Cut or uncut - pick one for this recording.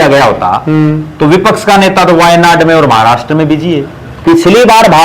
cut